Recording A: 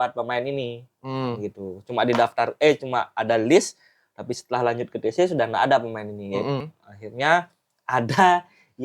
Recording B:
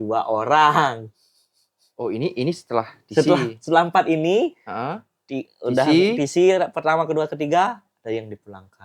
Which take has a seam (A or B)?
A